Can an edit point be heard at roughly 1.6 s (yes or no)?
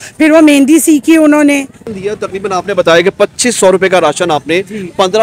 yes